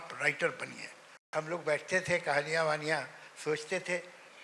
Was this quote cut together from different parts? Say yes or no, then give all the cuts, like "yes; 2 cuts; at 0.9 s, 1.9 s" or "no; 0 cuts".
yes; 1 cut; at 1.3 s